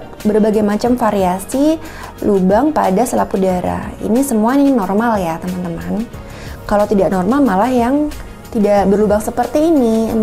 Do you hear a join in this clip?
no; 0 cuts

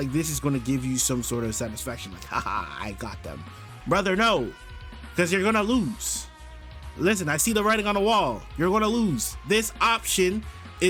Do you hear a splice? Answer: no; 0 cuts

